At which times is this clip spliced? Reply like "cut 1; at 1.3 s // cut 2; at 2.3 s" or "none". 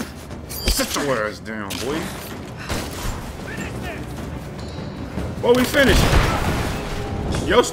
cut 1; at 3.4 s